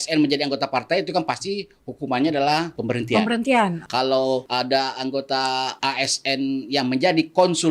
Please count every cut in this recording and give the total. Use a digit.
3